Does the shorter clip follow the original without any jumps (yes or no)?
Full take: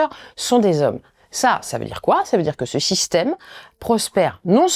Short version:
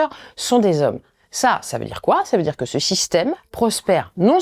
no